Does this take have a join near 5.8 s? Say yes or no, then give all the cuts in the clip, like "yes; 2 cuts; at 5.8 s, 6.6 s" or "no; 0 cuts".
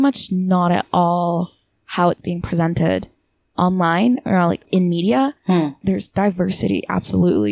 yes; 1 cut; at 5.8 s